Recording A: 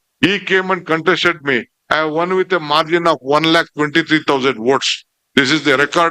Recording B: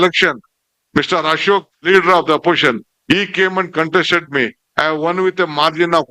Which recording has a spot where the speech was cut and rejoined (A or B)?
B